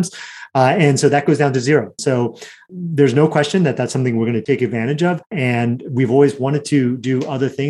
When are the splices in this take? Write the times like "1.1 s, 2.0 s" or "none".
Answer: 2.0 s, 4.4 s, 5.3 s